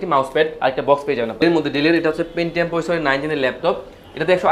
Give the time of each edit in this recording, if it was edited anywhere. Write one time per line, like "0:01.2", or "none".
0:01.4